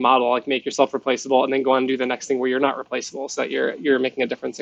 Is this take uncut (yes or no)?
yes